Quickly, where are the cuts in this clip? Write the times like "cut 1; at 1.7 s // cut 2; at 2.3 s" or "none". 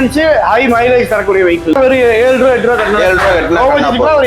cut 1; at 1.8 s